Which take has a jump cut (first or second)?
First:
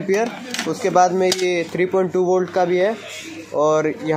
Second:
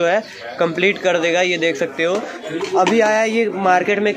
second